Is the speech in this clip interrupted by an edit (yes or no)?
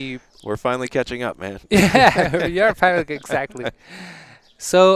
no